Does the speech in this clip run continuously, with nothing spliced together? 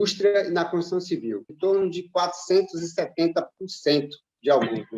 no; 1 cut; at 1.5 s

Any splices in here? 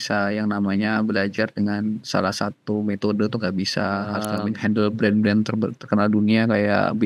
yes; 1 cut; at 4.3 s

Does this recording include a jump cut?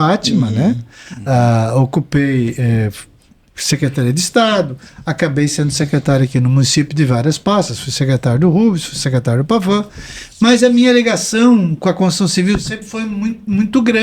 no; 0 cuts

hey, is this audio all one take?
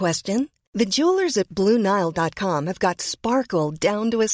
yes; 0 cuts

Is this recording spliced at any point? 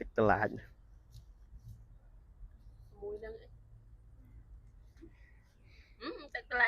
no; 0 cuts

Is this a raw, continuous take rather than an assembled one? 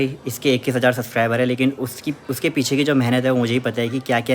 yes; 0 cuts

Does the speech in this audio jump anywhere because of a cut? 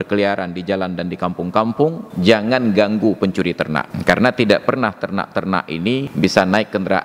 yes; 3 cuts; at 2.1 s, 3.9 s, 6.1 s

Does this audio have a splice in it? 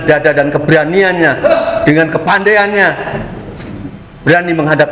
no; 0 cuts

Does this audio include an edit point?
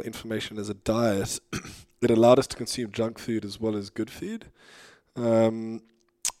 no; 0 cuts

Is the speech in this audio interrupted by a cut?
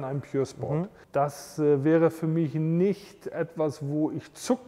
yes; 1 cut; at 1.0 s

